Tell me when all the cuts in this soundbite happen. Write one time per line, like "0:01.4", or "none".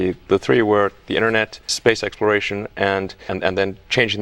0:03.3